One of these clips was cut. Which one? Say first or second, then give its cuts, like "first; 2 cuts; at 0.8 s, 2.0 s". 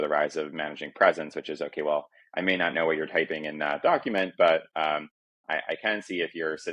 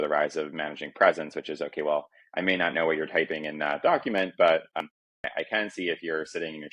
second; 1 cut; at 4.8 s